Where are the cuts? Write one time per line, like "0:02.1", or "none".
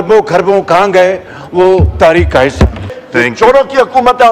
0:02.8